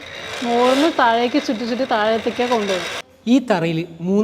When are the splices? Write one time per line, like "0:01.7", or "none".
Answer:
0:03.0